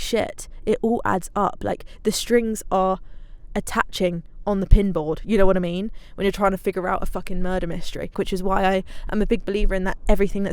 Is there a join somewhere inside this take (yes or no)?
yes